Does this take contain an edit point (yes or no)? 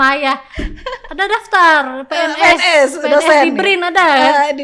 no